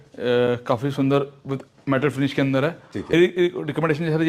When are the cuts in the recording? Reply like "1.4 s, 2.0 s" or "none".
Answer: 3.1 s